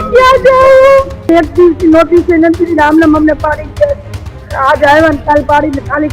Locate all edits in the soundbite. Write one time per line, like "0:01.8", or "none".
0:01.3